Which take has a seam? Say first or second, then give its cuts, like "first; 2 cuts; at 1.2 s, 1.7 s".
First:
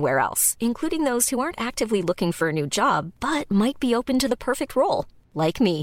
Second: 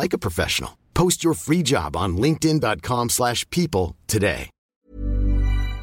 second; 1 cut; at 4.5 s